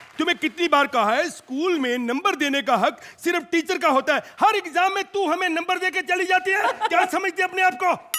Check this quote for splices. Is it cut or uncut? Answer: uncut